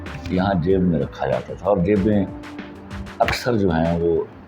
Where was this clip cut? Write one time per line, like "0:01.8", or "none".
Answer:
none